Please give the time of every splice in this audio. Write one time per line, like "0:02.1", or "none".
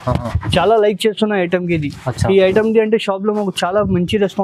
none